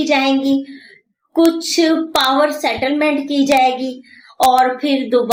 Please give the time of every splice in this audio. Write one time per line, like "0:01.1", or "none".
none